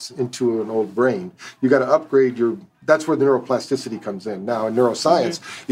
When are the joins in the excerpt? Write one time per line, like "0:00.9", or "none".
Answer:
none

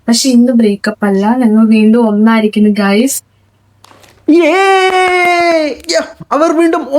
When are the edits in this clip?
none

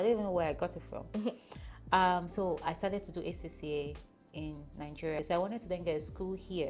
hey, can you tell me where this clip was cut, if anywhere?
none

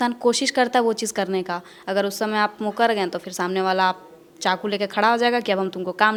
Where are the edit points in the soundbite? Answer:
none

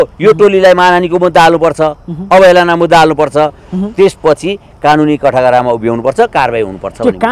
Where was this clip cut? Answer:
none

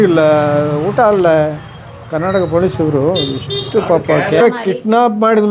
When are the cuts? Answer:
0:04.4

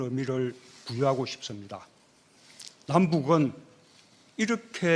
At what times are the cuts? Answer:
0:03.8

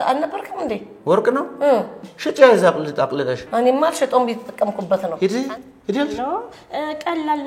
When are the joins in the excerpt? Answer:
0:05.1

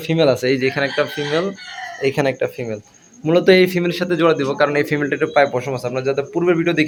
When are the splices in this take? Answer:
none

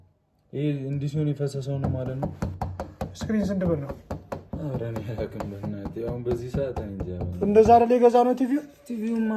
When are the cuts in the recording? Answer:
0:07.4

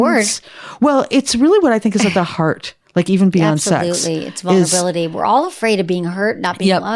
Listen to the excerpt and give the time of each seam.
none

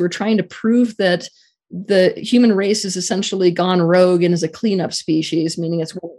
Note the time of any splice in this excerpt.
none

